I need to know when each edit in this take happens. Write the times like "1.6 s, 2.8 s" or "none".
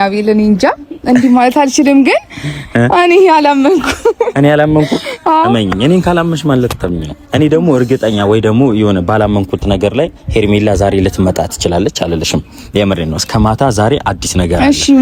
none